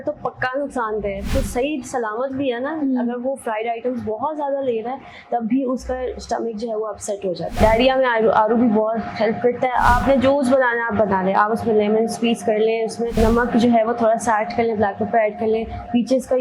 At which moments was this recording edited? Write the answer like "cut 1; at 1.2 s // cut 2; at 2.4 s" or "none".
cut 1; at 1.3 s // cut 2; at 7.5 s // cut 3; at 13.2 s